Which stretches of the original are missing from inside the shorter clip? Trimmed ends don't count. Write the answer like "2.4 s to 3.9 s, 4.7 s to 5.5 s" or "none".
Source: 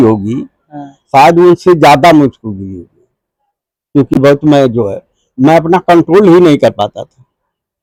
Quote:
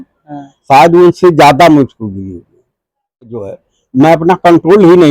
3.8 s to 4.8 s

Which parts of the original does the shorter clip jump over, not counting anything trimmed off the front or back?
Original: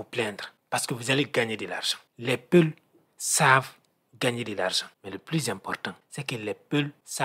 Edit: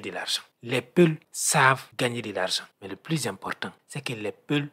3.2 s to 3.8 s

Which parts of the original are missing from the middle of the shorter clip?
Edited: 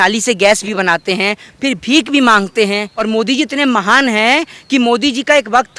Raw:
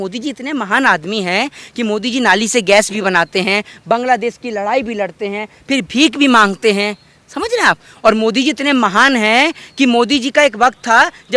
3.7 s to 5.5 s, 7.1 s to 8.1 s

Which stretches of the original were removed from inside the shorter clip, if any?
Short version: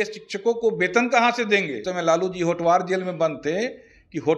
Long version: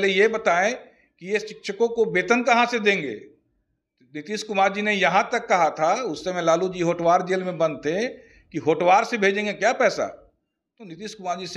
3.2 s to 6.2 s

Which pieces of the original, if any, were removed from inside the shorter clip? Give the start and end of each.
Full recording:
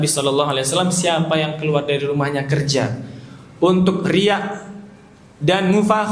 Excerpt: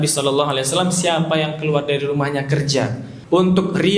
3.1 s to 3.4 s

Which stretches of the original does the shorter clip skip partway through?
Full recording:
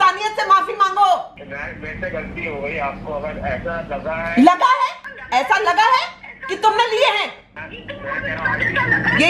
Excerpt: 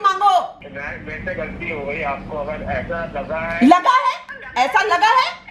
none

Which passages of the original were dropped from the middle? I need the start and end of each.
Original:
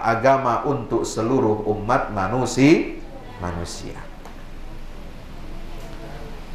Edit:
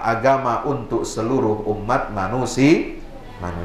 none

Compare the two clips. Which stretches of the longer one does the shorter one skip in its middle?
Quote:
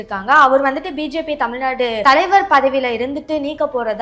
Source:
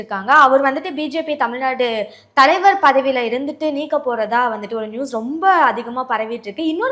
2.0 s to 2.3 s

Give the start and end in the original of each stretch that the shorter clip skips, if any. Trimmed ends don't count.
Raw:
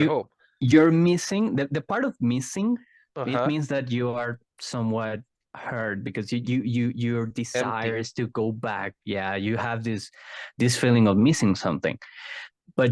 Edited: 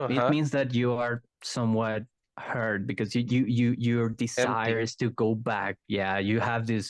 none

